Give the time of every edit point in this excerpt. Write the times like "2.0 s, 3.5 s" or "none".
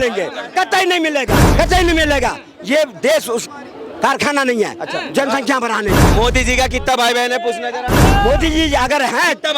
1.4 s, 6.0 s, 8.0 s